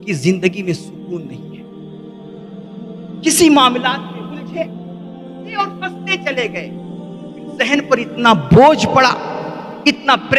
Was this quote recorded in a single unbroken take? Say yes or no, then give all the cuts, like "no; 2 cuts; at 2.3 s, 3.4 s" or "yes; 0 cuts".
yes; 0 cuts